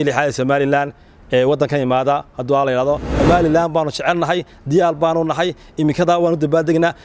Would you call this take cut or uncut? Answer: cut